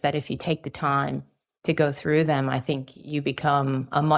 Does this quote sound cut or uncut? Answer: uncut